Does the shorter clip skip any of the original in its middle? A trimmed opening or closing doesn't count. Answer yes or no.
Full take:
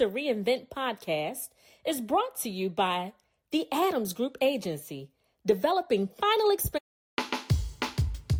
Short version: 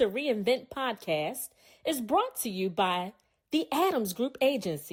no